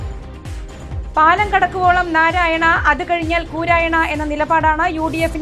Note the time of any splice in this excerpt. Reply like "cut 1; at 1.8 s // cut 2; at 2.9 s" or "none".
cut 1; at 1.1 s